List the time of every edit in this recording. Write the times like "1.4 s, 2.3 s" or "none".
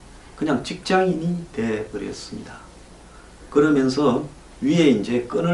none